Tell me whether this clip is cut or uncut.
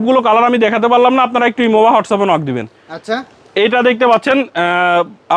uncut